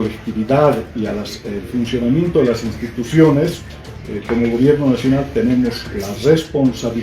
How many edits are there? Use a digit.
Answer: 1